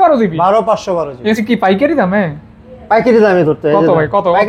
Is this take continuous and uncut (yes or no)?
no